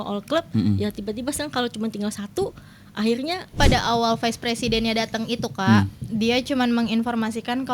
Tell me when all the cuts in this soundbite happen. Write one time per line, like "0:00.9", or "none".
0:03.5